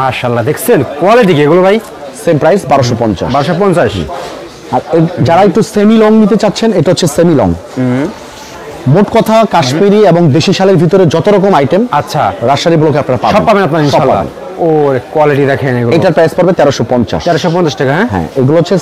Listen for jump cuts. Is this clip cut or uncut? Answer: uncut